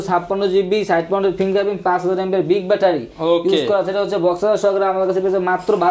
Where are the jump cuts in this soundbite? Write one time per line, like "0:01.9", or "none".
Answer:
none